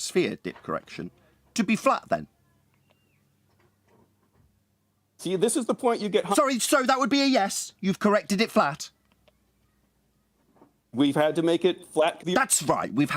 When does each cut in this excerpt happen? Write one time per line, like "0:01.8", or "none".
0:12.2